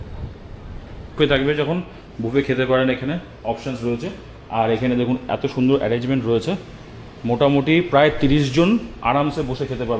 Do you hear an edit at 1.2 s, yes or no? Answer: yes